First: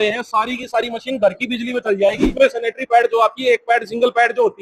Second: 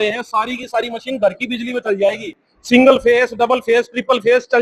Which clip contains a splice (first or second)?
first